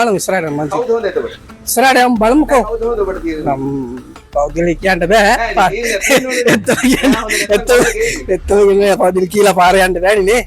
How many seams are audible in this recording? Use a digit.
0